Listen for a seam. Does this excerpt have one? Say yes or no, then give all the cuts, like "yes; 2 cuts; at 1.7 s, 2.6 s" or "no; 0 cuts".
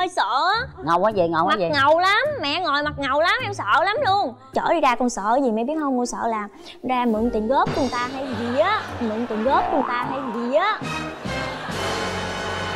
yes; 1 cut; at 4.5 s